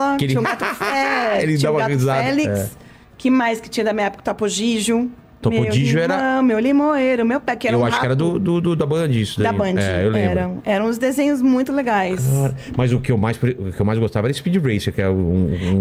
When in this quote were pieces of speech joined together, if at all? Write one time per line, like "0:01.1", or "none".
none